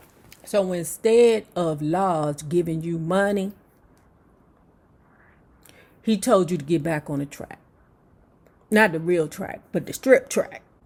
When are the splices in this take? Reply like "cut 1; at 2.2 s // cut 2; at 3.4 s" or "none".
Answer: none

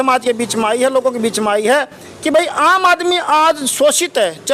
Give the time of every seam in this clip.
none

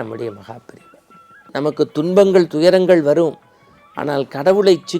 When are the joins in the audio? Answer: cut 1; at 1.5 s

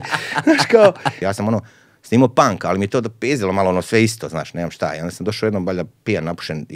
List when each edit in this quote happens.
cut 1; at 1.1 s

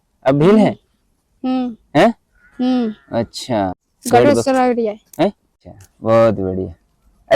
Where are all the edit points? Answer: cut 1; at 3.8 s // cut 2; at 5.6 s

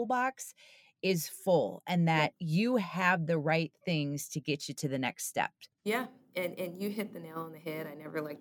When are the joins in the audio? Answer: cut 1; at 2.4 s // cut 2; at 5.7 s

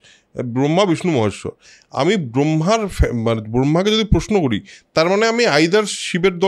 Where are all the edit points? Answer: none

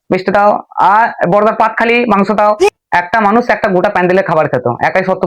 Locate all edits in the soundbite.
cut 1; at 2.7 s

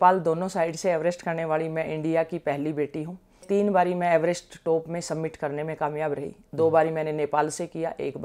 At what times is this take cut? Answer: cut 1; at 3.4 s

